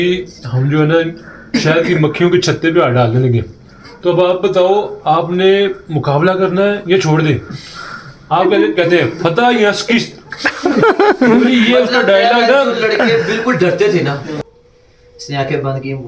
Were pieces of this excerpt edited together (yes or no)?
yes